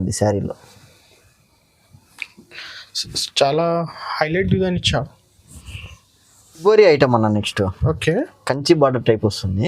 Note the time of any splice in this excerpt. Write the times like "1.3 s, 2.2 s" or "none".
6.6 s